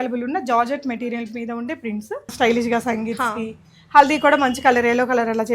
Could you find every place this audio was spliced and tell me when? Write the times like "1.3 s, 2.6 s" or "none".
2.3 s